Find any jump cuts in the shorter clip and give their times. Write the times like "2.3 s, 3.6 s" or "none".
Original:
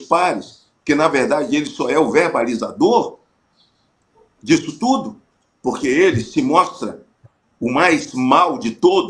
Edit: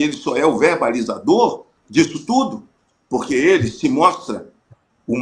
1.7 s